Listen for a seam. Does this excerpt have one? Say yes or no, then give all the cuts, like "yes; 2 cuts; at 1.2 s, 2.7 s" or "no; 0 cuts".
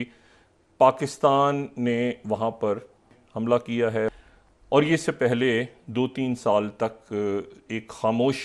yes; 2 cuts; at 3.2 s, 4.1 s